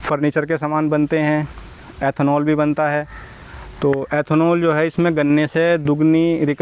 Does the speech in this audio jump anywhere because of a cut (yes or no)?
no